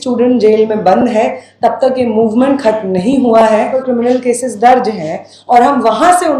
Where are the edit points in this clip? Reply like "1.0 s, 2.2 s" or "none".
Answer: 3.8 s

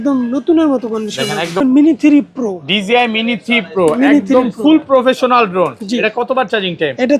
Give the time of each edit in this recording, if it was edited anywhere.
1.6 s

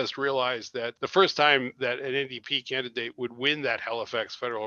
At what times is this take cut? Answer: 1.0 s

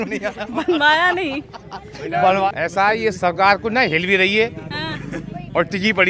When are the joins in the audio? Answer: 2.5 s

